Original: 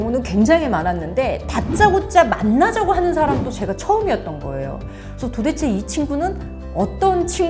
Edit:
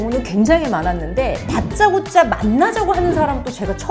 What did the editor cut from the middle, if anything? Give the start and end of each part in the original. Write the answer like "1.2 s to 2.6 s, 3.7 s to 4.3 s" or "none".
none